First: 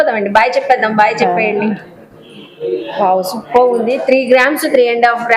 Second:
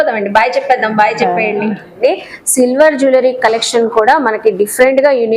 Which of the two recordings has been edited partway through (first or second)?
second